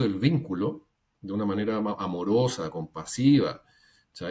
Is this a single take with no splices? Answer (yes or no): yes